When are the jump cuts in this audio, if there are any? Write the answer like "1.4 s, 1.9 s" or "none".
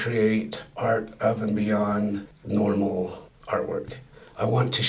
2.3 s, 3.3 s